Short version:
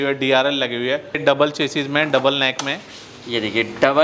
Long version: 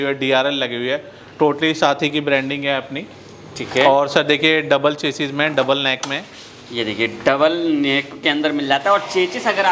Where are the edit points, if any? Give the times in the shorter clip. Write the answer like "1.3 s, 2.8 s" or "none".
1.2 s